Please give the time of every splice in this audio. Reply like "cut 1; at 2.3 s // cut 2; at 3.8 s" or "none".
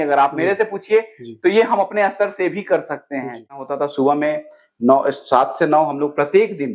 cut 1; at 3.6 s